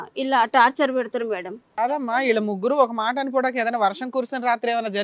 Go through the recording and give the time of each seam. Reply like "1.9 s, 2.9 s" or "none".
1.7 s